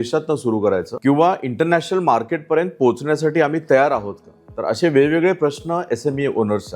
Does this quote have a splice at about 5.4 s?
no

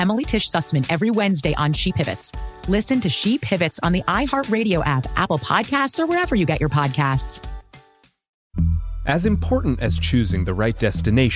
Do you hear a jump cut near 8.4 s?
yes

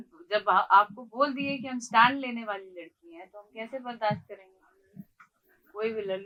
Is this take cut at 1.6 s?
no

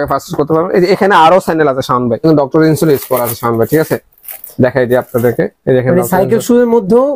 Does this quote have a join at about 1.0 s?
no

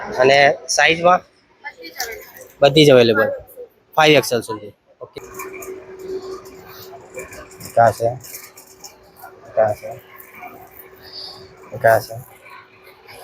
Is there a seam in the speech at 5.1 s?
yes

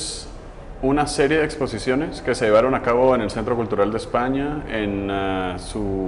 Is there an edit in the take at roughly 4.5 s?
no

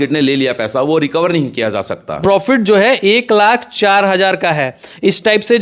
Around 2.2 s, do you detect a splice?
yes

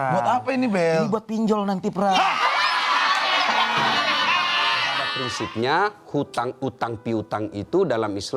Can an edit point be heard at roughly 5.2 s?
yes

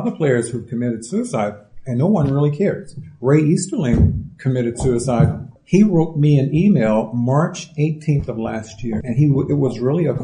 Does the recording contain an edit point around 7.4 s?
no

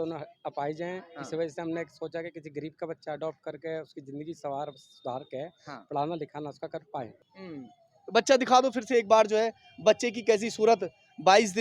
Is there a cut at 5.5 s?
no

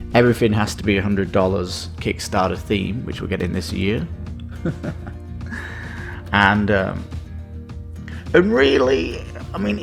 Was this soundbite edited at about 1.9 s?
no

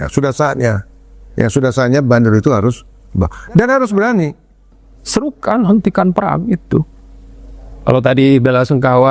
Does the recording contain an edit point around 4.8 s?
yes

